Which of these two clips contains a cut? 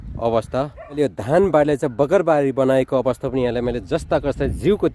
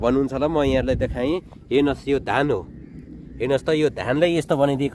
first; 1 cut; at 1.0 s

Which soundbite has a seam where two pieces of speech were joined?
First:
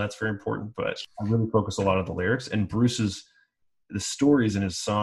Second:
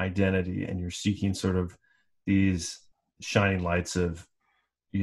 first; 1 cut; at 1.0 s

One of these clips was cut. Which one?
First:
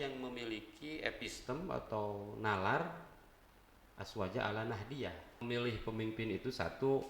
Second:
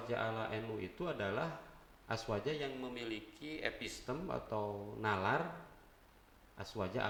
first; 1 cut; at 5.4 s

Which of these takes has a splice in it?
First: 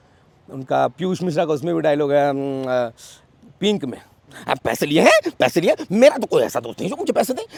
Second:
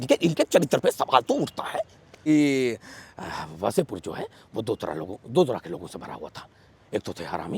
second; 1 cut; at 2.2 s

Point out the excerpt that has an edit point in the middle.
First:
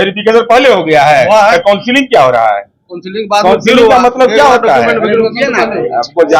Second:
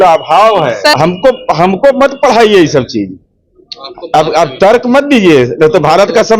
second; 1 cut; at 0.9 s

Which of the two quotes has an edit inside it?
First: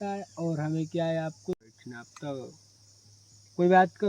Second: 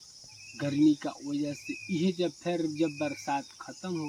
first; 1 cut; at 1.6 s

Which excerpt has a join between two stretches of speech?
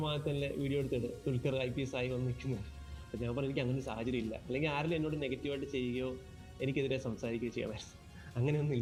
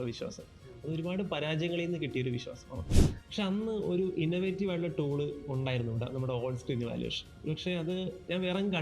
second; 1 cut; at 3.0 s

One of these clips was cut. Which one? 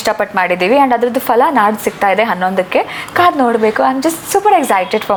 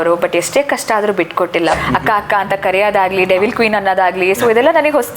second; 1 cut; at 1.8 s

